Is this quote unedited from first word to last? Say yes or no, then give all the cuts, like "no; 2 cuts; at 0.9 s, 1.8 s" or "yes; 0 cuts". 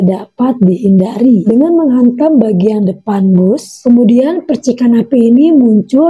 no; 2 cuts; at 1.4 s, 3.8 s